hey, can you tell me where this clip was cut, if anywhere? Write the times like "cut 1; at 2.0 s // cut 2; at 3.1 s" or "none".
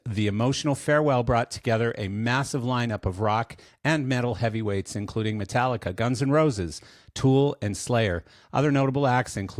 none